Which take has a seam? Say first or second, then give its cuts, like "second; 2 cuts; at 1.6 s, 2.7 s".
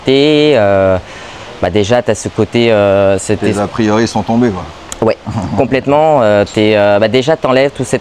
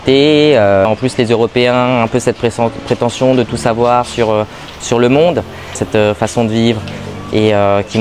second; 2 cuts; at 0.9 s, 5.8 s